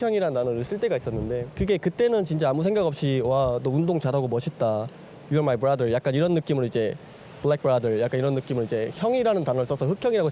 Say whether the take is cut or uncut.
uncut